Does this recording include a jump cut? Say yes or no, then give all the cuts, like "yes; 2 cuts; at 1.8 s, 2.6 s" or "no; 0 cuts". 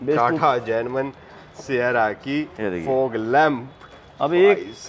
no; 0 cuts